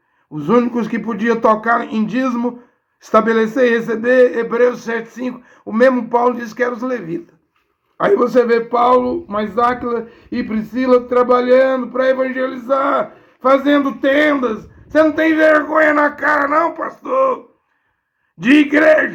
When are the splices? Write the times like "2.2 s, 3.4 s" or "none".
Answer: none